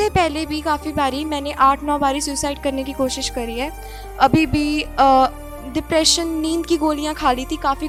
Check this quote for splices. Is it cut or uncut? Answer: uncut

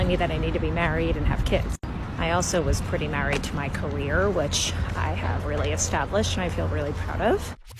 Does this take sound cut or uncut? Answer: uncut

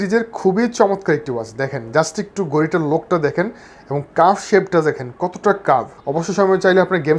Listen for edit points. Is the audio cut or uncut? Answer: cut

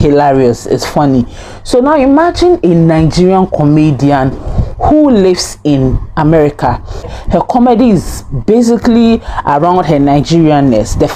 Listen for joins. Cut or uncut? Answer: cut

